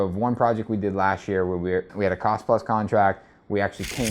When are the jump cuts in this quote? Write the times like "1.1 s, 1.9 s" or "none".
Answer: 1.9 s